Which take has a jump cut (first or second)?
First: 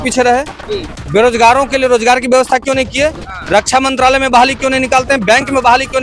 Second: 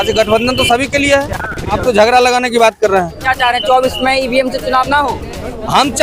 second